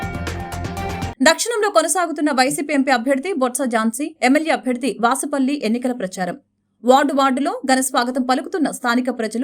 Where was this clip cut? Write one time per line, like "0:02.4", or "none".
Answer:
0:01.1